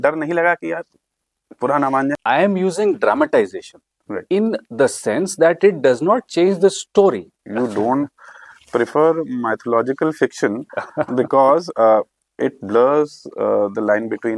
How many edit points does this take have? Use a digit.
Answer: 2